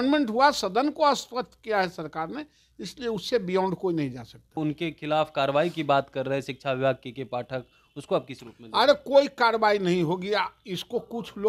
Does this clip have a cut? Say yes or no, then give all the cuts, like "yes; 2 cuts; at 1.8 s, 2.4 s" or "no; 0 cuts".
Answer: yes; 1 cut; at 4.6 s